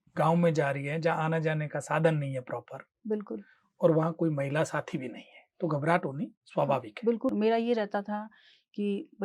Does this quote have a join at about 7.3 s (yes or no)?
yes